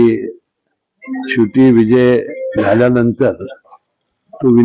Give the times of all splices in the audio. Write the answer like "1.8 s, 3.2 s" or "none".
none